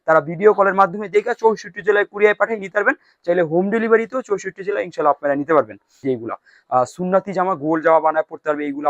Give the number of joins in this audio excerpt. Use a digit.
1